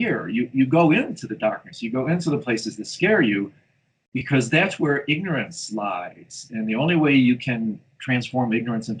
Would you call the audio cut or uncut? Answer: uncut